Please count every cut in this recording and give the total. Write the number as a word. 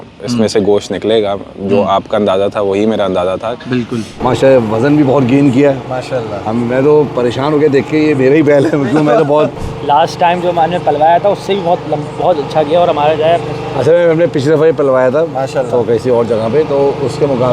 two